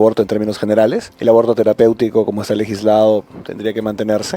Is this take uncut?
no; 1 cut; at 1.1 s

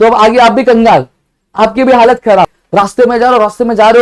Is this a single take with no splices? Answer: no; 1 cut; at 2.6 s

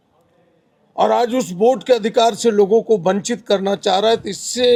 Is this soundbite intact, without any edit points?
yes; 0 cuts

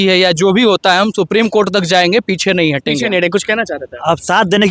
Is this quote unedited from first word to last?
yes; 0 cuts

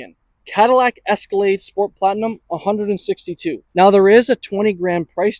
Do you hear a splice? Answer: yes; 1 cut; at 3.6 s

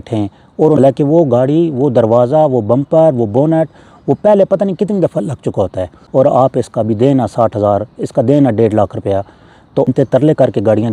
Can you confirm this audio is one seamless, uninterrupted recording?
no; 3 cuts; at 0.8 s, 5.9 s, 9.9 s

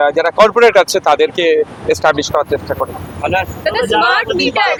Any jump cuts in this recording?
no; 0 cuts

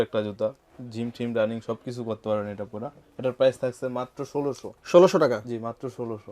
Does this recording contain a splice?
no; 0 cuts

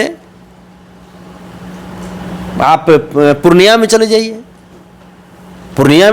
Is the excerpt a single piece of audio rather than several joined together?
yes; 0 cuts

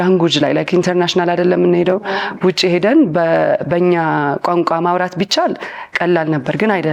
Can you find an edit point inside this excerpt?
no; 0 cuts

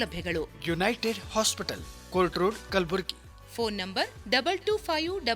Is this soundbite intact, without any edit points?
yes; 0 cuts

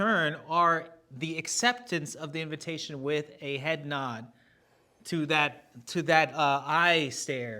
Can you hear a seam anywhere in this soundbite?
no; 0 cuts

